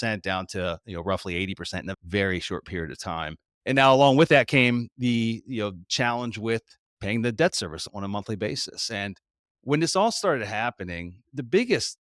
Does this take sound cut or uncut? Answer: uncut